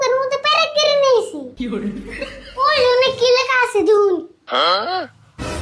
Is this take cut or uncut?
cut